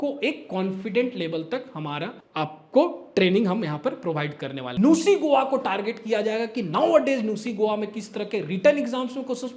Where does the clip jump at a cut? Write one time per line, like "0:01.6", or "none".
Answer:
0:02.2
0:04.6